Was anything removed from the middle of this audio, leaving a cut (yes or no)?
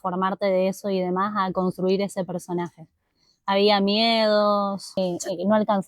yes